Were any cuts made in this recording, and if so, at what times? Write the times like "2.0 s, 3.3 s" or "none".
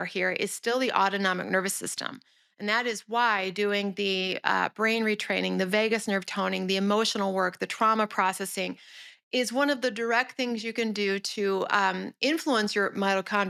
none